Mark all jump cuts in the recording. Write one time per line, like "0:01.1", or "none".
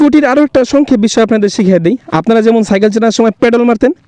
none